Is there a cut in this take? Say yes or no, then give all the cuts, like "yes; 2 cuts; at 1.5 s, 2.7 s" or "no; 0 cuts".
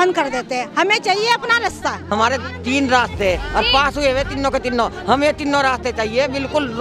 yes; 1 cut; at 2.0 s